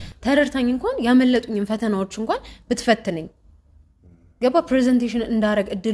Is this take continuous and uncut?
yes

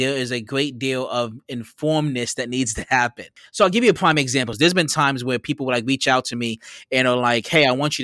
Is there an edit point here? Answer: yes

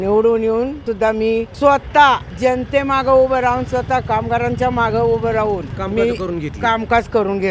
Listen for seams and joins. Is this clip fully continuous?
no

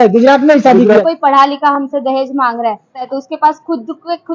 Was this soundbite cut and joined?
yes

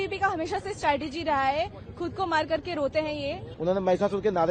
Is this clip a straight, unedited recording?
no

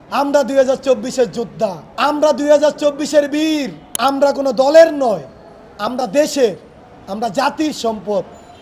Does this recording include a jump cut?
yes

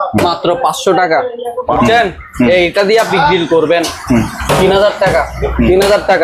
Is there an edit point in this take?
yes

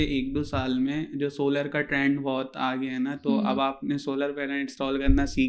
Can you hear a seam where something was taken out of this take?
no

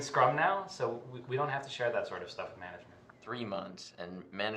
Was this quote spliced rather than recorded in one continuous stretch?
yes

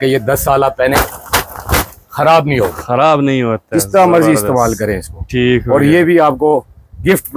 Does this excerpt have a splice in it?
no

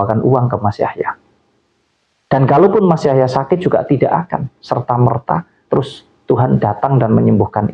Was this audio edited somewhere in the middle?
no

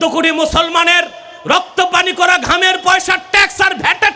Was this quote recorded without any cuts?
yes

